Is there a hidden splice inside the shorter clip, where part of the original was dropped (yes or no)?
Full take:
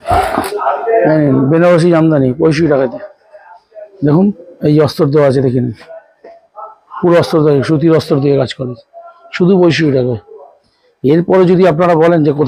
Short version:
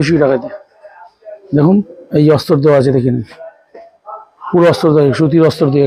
no